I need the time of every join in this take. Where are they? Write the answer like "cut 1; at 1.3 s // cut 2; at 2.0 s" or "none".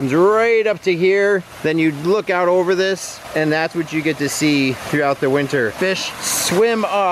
cut 1; at 5.7 s